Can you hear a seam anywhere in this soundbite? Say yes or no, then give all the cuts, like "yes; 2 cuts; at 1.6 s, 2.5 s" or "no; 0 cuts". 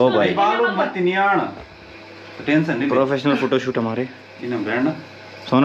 no; 0 cuts